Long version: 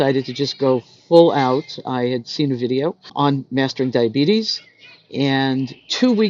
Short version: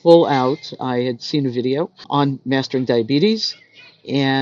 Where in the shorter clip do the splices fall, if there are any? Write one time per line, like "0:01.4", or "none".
none